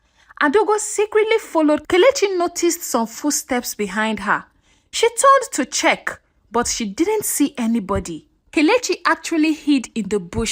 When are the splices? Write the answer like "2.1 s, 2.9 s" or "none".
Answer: 1.8 s, 8.4 s